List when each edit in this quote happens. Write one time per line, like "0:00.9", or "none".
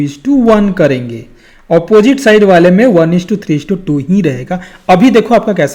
none